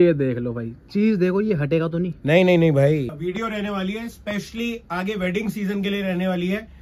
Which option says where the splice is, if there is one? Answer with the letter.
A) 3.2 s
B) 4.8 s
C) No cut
A